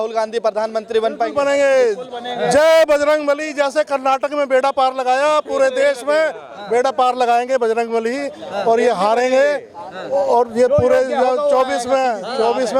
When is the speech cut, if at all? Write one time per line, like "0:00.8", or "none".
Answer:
none